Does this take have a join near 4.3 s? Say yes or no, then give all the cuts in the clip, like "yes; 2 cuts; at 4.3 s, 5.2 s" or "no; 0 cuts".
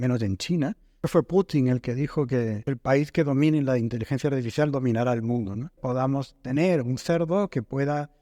no; 3 cuts; at 1.0 s, 2.6 s, 5.8 s